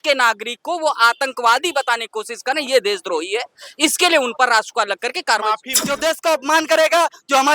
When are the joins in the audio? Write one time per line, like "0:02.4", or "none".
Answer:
0:05.8